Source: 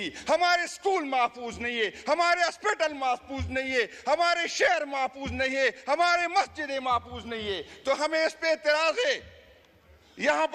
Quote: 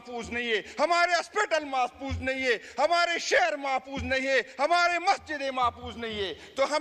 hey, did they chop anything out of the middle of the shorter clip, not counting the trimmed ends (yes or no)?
no